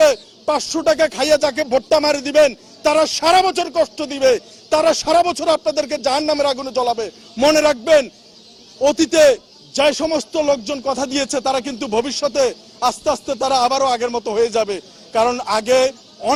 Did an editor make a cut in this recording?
no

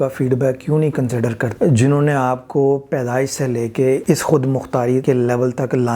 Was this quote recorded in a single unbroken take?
no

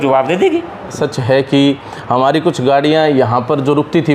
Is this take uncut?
no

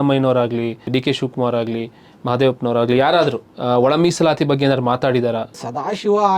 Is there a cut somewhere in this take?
yes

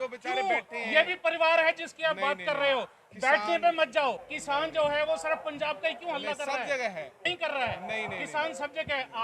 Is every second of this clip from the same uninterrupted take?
no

